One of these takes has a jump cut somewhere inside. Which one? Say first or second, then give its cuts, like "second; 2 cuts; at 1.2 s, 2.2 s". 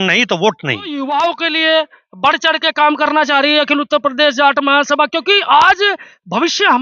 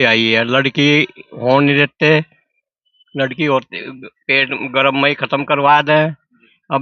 first; 1 cut; at 0.9 s